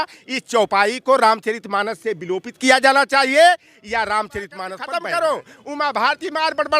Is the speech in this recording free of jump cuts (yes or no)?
no